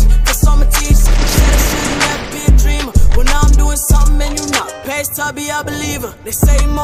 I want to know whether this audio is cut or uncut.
uncut